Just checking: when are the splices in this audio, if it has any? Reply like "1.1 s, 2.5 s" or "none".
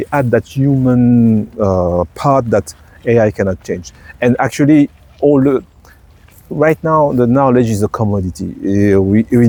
none